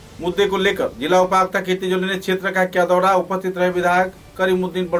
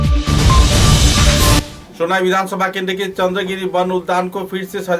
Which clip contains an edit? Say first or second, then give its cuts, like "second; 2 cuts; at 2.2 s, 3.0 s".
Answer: second; 1 cut; at 1.7 s